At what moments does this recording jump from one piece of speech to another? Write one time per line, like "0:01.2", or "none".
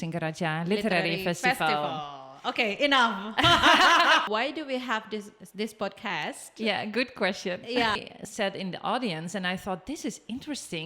0:04.3
0:08.1